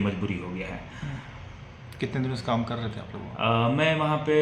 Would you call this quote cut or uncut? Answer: uncut